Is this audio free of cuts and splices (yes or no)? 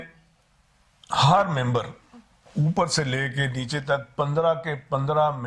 yes